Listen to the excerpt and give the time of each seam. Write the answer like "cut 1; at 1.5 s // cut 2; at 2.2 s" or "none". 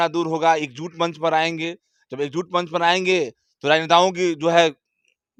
none